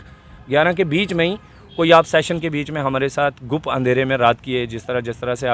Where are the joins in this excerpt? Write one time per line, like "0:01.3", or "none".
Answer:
none